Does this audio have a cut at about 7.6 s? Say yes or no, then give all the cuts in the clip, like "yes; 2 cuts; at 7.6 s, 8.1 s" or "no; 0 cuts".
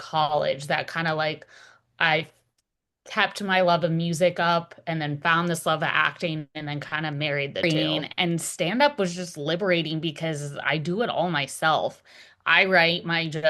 yes; 1 cut; at 7.6 s